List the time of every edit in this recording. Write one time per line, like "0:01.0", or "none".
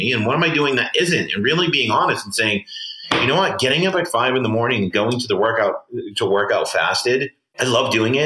none